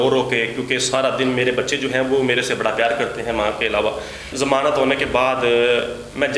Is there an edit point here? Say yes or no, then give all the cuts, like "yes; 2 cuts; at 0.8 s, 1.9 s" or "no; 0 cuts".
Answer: yes; 1 cut; at 4.3 s